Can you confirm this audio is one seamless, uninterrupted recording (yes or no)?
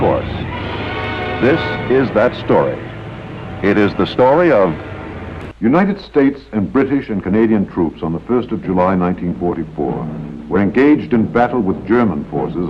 no